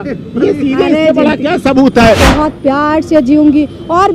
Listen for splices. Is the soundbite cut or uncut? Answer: cut